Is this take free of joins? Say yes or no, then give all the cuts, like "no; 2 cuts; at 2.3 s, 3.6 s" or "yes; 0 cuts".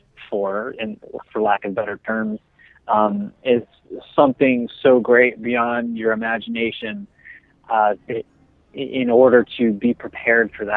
yes; 0 cuts